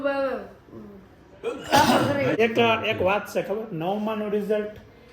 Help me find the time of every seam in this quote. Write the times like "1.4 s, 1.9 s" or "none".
2.4 s